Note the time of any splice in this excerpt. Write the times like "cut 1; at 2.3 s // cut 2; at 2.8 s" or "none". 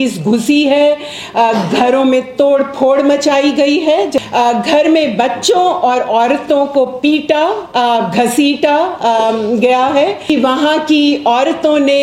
cut 1; at 4.2 s // cut 2; at 10.2 s